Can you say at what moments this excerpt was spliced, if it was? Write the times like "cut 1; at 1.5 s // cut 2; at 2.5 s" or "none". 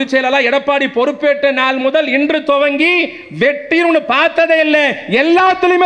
none